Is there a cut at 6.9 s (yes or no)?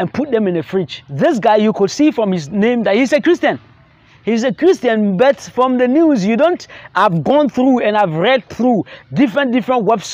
no